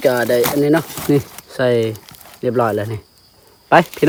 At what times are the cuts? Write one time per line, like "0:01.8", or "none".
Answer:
none